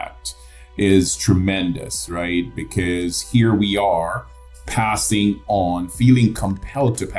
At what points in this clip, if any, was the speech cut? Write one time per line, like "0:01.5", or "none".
none